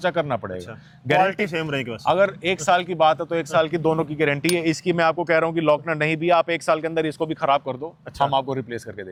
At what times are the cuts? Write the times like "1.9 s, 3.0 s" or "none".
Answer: none